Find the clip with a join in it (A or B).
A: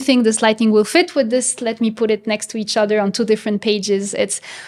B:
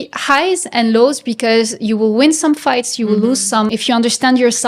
B